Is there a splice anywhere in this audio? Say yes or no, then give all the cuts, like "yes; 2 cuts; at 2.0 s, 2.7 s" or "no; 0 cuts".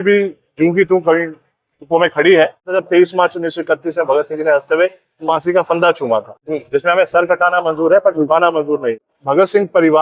yes; 3 cuts; at 2.7 s, 6.4 s, 9.1 s